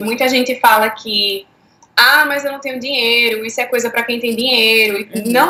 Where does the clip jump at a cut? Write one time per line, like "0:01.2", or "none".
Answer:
none